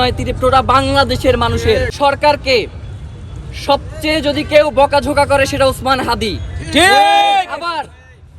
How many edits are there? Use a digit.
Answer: 1